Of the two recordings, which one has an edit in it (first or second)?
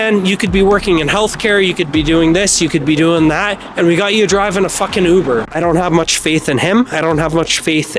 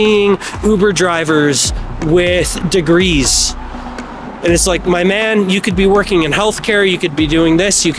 first